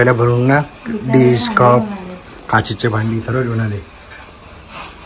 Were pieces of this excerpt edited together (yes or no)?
no